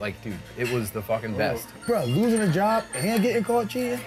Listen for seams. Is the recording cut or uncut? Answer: cut